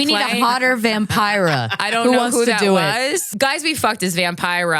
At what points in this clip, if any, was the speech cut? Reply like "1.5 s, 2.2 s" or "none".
3.3 s